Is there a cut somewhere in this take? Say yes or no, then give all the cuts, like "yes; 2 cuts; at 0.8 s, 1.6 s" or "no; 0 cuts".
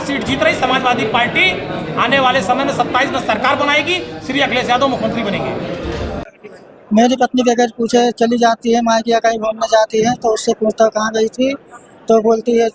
yes; 1 cut; at 6.3 s